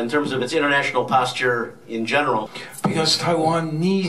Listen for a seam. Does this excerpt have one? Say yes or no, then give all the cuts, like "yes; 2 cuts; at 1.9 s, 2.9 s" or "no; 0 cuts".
yes; 1 cut; at 2.6 s